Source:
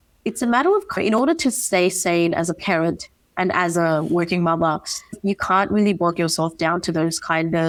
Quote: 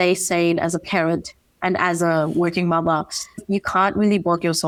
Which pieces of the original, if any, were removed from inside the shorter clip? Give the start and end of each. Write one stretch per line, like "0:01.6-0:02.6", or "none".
none